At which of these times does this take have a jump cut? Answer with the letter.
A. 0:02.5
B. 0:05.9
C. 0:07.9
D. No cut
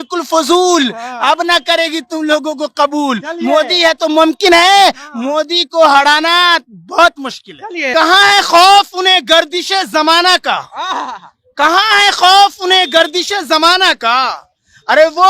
C